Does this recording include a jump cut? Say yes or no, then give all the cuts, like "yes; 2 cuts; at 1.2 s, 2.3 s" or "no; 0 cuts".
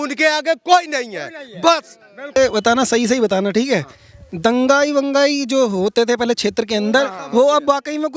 yes; 1 cut; at 2.4 s